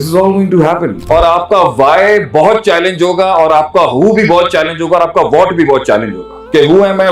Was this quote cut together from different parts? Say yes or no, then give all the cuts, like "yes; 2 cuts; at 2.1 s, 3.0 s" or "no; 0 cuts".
yes; 1 cut; at 1.0 s